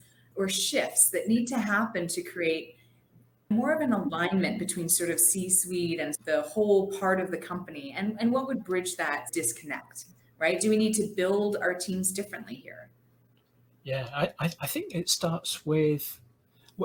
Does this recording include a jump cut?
no; 0 cuts

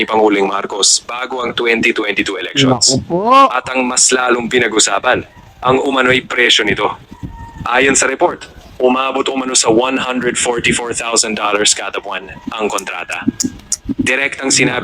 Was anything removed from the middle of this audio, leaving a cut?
no; 0 cuts

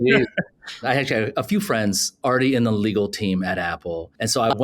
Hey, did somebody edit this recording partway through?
yes; 2 cuts; at 0.8 s, 2.1 s

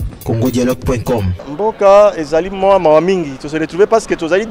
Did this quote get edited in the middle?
yes; 1 cut; at 1.4 s

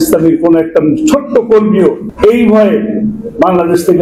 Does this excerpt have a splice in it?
yes; 1 cut; at 2.1 s

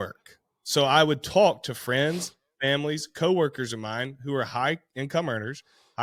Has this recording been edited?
no; 0 cuts

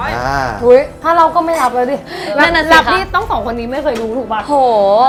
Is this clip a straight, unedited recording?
yes; 0 cuts

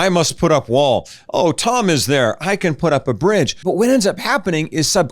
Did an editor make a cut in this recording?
yes; 1 cut; at 3.6 s

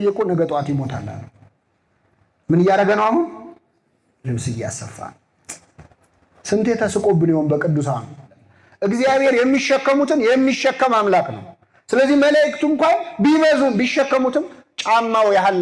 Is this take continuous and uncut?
no; 1 cut; at 8.4 s

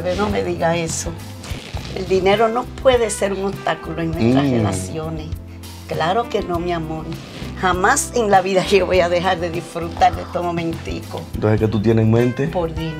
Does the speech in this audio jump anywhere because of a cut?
no; 0 cuts

